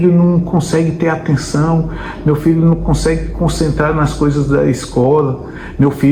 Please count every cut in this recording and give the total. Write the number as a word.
zero